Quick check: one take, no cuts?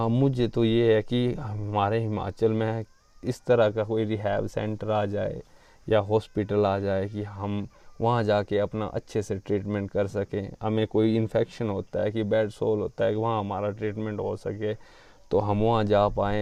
yes; 0 cuts

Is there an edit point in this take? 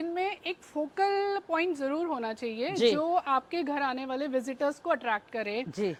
no; 0 cuts

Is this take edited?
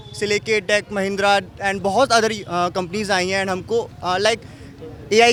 no; 0 cuts

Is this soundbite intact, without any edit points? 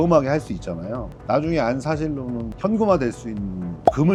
yes; 0 cuts

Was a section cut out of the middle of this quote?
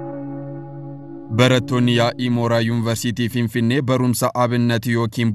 yes; 1 cut; at 1.3 s

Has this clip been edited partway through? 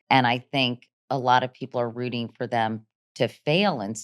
yes; 1 cut; at 0.9 s

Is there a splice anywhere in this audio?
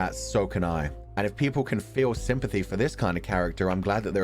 yes; 1 cut; at 1.0 s

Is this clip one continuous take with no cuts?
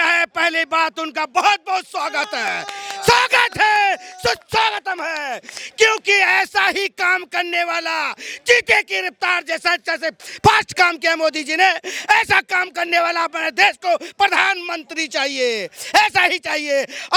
yes; 0 cuts

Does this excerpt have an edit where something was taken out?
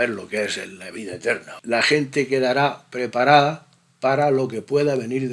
yes; 1 cut; at 1.5 s

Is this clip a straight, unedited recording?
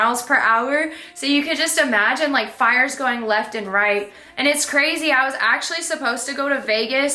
yes; 0 cuts

